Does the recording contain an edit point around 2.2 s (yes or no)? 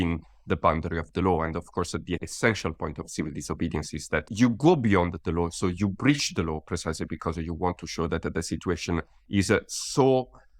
yes